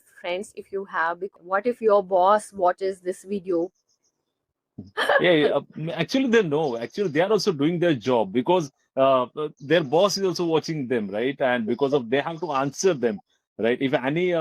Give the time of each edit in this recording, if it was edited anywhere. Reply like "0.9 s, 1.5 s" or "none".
1.3 s